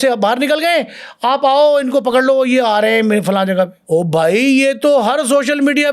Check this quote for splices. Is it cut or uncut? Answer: uncut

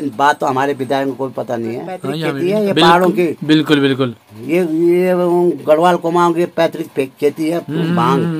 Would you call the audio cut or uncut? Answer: cut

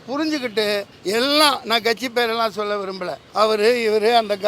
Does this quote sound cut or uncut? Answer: cut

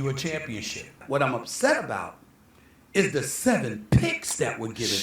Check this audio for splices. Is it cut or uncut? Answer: cut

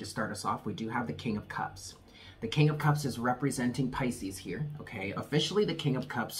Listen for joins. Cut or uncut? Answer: uncut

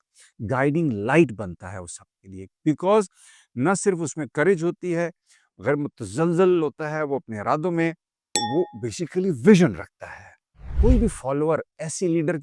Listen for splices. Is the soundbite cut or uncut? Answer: cut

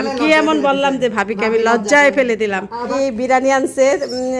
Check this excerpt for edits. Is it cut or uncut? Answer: cut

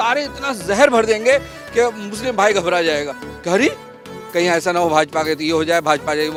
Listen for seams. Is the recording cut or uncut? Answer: uncut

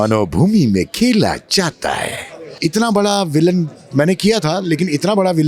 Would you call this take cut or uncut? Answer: cut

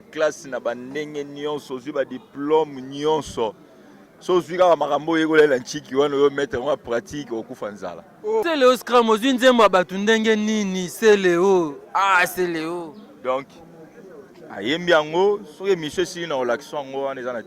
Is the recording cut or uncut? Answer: cut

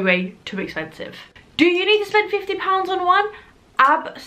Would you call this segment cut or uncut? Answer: cut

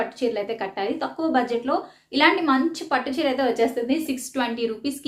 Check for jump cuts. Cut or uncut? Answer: cut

